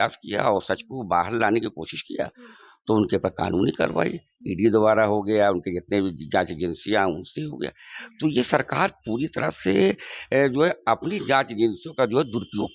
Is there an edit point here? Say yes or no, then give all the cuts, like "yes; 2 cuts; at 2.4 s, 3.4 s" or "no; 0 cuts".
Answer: no; 0 cuts